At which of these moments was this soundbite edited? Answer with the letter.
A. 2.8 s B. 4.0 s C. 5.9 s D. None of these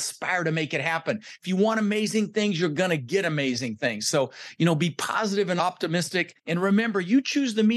C